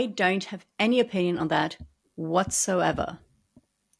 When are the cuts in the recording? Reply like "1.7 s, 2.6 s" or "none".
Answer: none